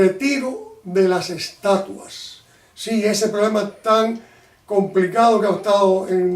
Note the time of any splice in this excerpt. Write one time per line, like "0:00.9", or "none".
0:04.3

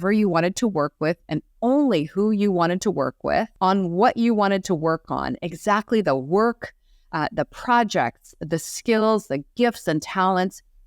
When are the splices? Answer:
0:03.5

